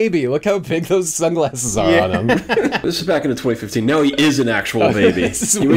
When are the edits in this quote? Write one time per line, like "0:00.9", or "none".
none